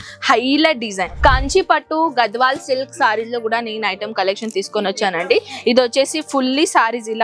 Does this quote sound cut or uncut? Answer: cut